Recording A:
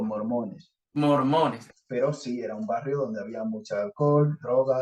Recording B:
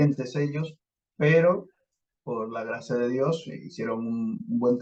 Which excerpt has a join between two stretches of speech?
A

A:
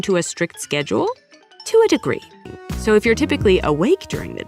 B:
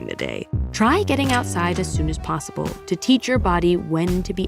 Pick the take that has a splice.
A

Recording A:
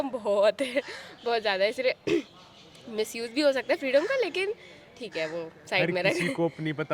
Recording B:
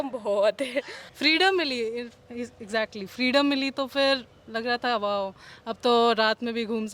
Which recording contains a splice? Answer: B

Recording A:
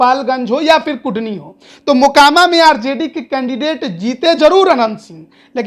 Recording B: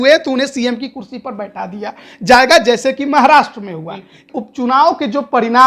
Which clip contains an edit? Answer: B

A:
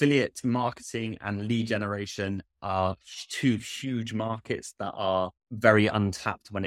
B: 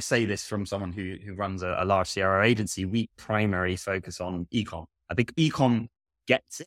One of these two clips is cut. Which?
A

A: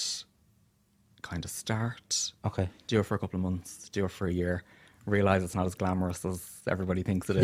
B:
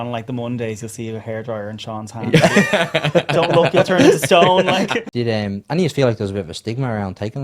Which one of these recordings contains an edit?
B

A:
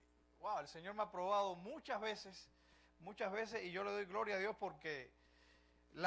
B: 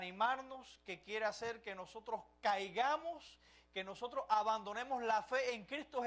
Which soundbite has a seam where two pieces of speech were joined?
A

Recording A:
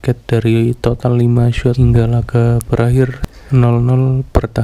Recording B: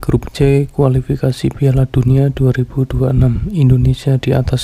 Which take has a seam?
A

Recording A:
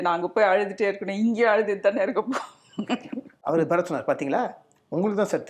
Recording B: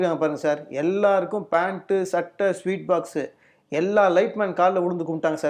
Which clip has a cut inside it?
A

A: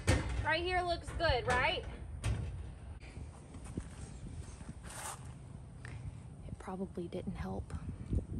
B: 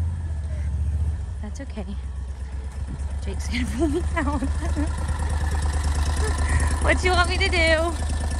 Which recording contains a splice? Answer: A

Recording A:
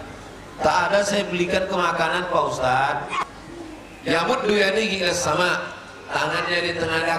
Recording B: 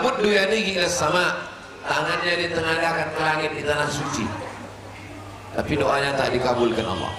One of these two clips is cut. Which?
A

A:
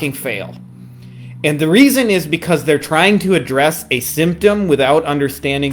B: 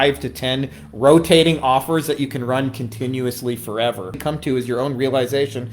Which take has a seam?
B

